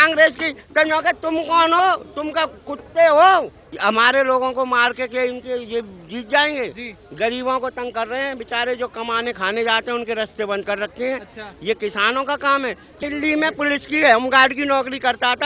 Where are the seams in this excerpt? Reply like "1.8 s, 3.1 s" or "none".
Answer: 3.6 s, 13.0 s